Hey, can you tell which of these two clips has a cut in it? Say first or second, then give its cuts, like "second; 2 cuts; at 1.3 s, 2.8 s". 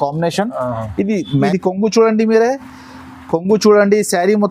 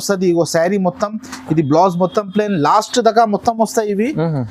first; 1 cut; at 1.4 s